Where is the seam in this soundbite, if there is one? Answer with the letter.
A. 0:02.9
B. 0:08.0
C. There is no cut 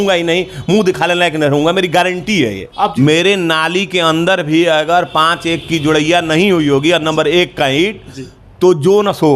A